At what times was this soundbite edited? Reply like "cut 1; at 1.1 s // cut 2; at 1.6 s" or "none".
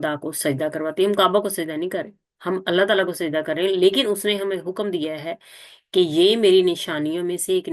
none